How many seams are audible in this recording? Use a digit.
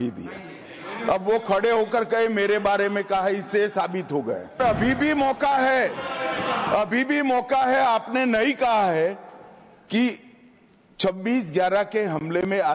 1